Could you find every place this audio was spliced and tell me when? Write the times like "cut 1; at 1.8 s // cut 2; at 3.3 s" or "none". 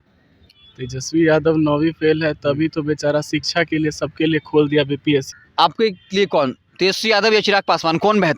cut 1; at 5.4 s